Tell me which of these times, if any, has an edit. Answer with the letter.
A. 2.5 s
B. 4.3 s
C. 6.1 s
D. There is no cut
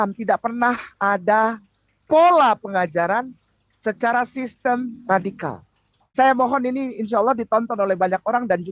C